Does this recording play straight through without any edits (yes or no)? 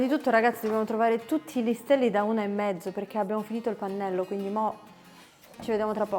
yes